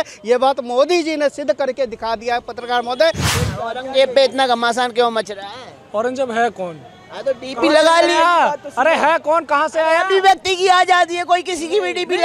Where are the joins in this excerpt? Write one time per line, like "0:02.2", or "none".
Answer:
0:03.3